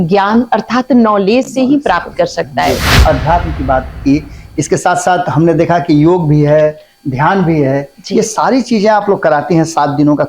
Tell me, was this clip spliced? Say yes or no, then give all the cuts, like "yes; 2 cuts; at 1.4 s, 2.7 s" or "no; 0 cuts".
yes; 1 cut; at 2.9 s